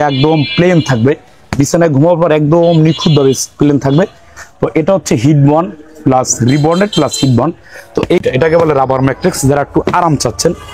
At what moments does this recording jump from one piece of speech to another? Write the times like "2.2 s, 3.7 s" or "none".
8.2 s